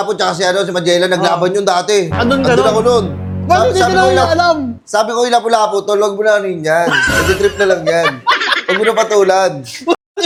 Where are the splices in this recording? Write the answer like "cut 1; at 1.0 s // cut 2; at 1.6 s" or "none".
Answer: none